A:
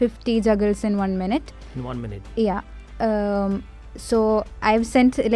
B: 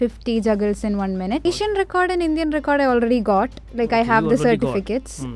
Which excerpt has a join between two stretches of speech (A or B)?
B